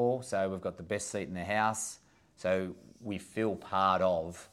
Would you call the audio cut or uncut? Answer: uncut